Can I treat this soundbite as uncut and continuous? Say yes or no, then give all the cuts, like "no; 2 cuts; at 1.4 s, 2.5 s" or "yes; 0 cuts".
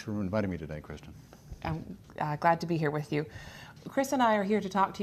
no; 1 cut; at 3.3 s